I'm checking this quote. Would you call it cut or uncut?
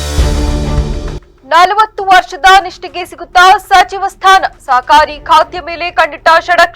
cut